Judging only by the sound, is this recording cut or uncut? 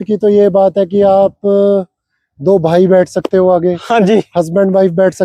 uncut